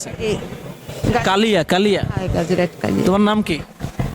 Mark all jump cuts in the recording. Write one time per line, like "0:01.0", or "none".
0:03.0